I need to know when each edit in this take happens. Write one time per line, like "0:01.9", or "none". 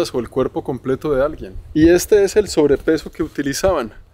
none